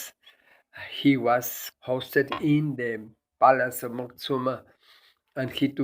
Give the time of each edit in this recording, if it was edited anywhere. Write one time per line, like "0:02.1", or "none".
0:01.6